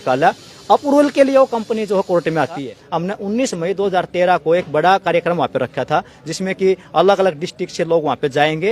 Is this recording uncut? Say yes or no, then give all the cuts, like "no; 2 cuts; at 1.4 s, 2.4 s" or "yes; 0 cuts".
no; 1 cut; at 2.8 s